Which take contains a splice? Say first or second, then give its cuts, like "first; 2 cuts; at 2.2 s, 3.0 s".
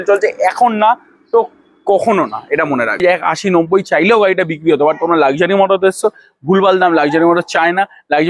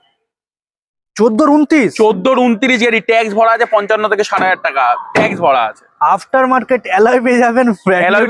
first; 1 cut; at 3.0 s